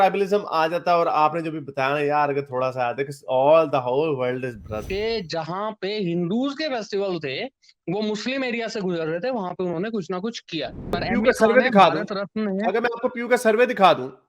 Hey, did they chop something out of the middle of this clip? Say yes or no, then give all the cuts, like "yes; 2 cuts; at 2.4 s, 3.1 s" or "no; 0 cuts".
yes; 2 cuts; at 4.8 s, 11.0 s